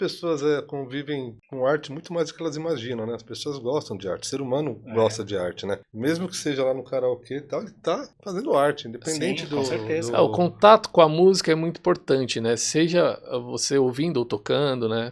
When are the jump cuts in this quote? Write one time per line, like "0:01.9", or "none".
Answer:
0:01.4
0:05.9
0:08.2